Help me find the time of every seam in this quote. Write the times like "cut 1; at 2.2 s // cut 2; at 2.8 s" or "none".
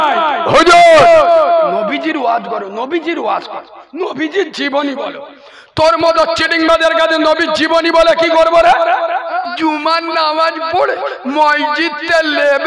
cut 1; at 9.4 s

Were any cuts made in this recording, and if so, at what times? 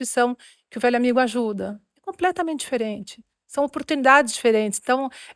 none

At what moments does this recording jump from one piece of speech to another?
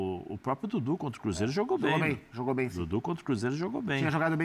none

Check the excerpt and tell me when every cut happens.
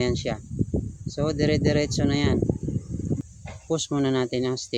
cut 1; at 3.3 s

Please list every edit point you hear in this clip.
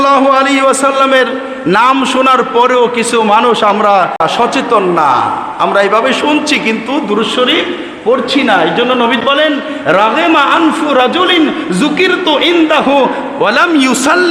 cut 1; at 4.2 s

